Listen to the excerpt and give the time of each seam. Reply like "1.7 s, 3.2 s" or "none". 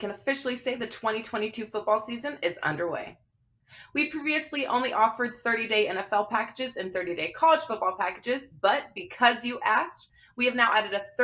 1.9 s